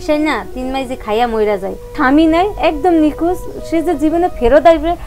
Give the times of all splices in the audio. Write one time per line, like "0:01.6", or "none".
0:01.9